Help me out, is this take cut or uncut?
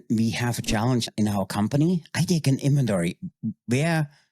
cut